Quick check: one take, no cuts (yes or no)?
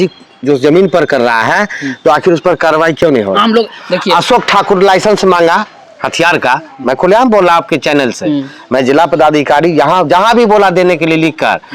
yes